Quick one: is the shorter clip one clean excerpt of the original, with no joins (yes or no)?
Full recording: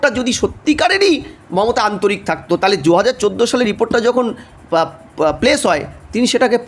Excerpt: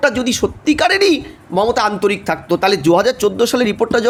yes